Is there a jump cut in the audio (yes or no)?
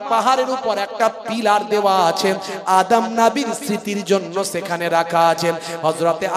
no